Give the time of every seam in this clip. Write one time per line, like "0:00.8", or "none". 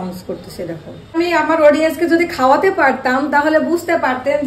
0:01.2